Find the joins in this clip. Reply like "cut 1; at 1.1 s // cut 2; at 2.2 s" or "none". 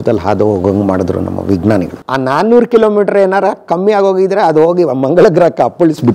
cut 1; at 2.0 s

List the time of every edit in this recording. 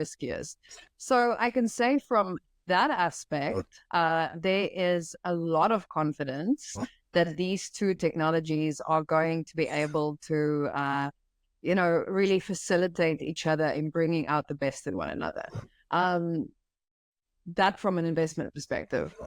none

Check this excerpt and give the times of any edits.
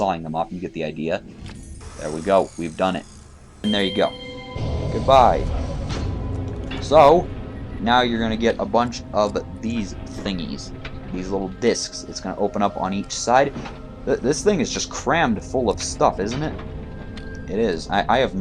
cut 1; at 3.6 s

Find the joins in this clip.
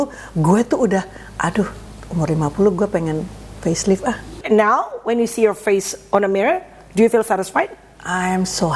cut 1; at 4.4 s

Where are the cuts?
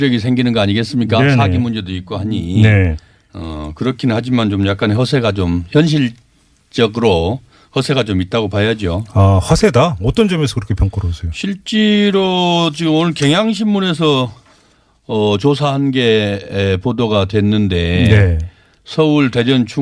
cut 1; at 17.9 s

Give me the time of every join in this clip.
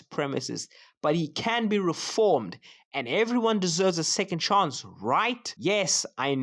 cut 1; at 5.5 s

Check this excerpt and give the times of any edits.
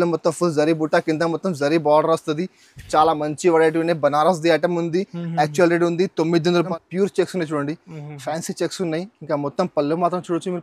cut 1; at 6.7 s

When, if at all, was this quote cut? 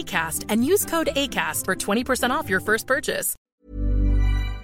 cut 1; at 3.3 s

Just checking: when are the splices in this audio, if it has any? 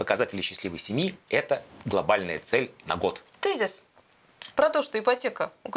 cut 1; at 3.3 s

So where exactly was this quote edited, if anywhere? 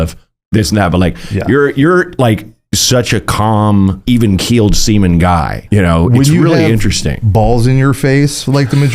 cut 1; at 4.0 s // cut 2; at 5.6 s

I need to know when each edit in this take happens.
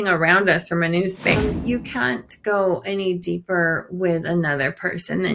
cut 1; at 1.4 s

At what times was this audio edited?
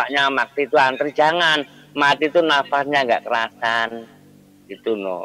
none

